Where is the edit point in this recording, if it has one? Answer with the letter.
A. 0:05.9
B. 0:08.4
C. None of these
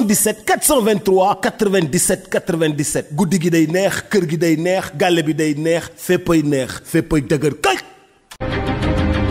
B